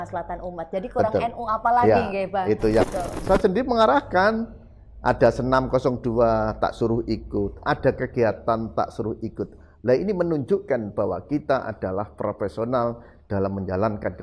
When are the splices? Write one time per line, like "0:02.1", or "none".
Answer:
0:02.9

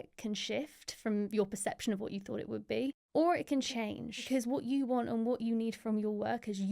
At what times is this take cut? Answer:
0:03.0
0:03.7

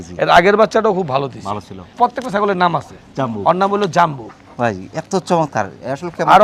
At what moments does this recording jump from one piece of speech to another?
0:01.8

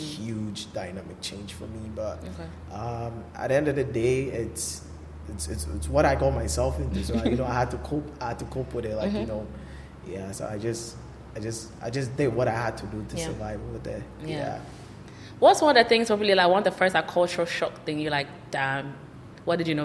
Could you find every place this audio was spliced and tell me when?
none

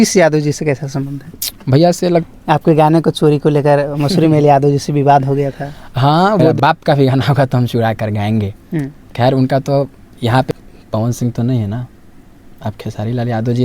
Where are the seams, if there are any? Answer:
0:02.2
0:06.5
0:10.5

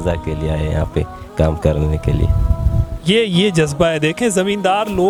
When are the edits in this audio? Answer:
none

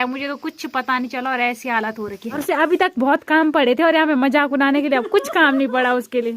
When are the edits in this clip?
0:02.4

